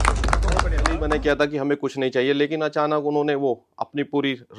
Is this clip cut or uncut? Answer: uncut